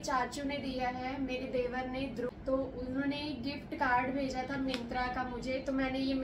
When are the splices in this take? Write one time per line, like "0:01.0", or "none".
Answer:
0:02.3